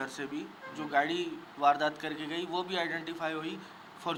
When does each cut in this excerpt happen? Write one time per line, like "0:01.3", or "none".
none